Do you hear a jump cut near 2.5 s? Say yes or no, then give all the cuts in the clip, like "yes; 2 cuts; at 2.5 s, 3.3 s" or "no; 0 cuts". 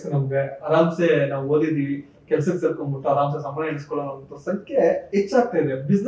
no; 0 cuts